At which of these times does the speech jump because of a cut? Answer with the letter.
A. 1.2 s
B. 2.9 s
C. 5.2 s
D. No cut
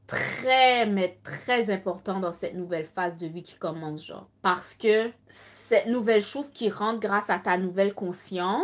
D